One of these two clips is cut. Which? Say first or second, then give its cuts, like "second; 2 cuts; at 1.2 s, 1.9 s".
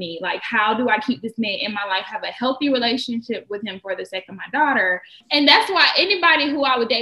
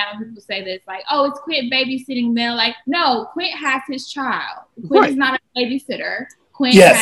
first; 1 cut; at 5.2 s